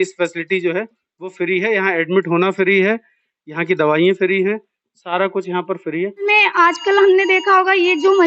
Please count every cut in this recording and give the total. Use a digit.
1